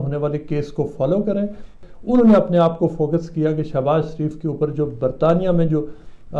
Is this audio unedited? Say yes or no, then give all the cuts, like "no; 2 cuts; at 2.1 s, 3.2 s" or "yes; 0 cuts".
no; 1 cut; at 1.8 s